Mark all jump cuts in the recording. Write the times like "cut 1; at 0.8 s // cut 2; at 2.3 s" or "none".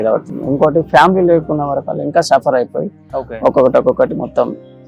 none

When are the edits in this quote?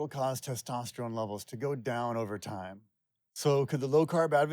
cut 1; at 3.1 s

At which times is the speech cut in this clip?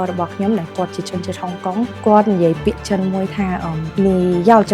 cut 1; at 1.9 s // cut 2; at 3.8 s

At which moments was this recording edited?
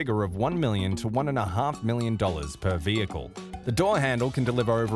cut 1; at 3.5 s

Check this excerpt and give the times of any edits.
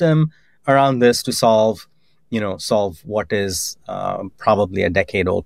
none

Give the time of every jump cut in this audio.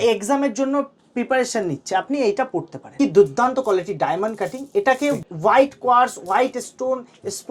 cut 1; at 2.8 s // cut 2; at 5.2 s

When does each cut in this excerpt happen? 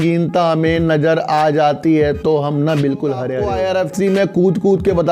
cut 1; at 3.4 s

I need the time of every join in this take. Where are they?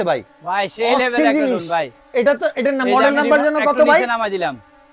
none

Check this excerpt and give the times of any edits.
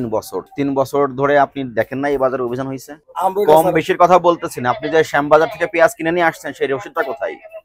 cut 1; at 3.1 s

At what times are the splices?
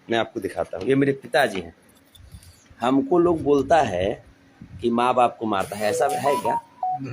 none

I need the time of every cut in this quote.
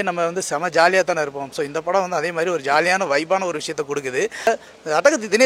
cut 1; at 4.5 s

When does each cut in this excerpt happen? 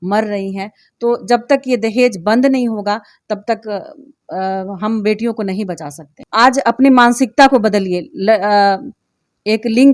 cut 1; at 6.2 s

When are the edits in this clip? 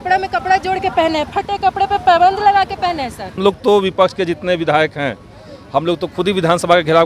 cut 1; at 3.4 s

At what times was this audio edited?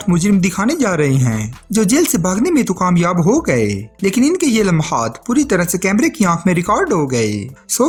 none

